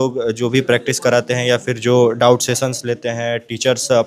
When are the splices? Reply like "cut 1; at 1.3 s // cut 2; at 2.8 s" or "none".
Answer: none

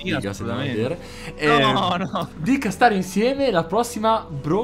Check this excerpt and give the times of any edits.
none

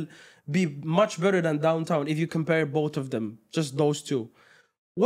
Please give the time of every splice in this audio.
none

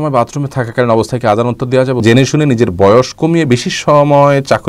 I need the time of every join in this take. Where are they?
cut 1; at 2.0 s

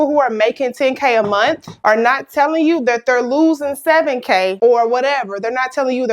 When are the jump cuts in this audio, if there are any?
cut 1; at 1.7 s

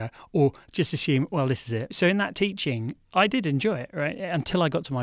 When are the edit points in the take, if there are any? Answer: cut 1; at 1.9 s

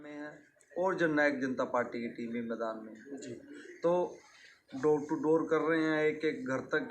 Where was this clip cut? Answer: none

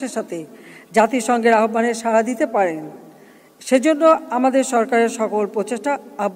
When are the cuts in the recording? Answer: none

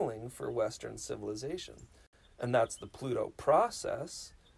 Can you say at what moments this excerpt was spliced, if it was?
cut 1; at 2.1 s

